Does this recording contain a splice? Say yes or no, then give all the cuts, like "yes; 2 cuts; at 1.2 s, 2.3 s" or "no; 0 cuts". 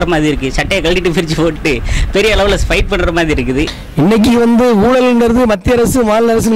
yes; 1 cut; at 3.8 s